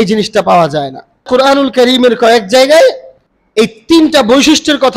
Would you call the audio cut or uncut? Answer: cut